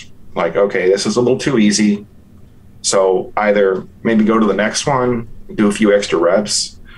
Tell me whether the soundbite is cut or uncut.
uncut